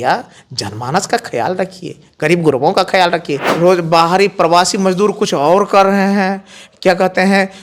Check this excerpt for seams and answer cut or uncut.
cut